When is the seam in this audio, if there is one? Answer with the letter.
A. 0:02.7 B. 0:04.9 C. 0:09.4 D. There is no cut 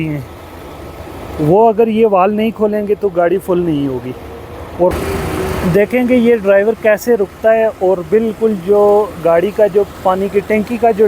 B